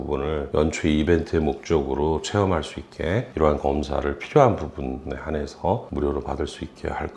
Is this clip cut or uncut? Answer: uncut